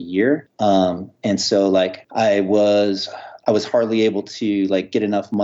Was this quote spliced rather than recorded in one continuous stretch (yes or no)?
yes